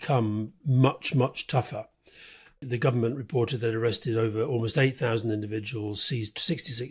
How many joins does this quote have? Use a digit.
1